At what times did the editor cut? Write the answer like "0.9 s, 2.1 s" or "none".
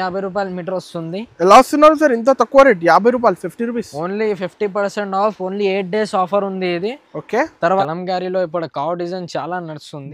7.8 s